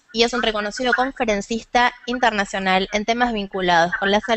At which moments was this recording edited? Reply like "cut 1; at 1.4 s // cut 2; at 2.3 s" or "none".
cut 1; at 3.3 s